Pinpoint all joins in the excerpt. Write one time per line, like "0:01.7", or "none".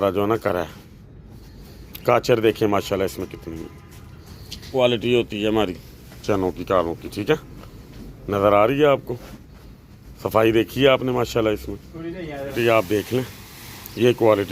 0:04.7
0:12.5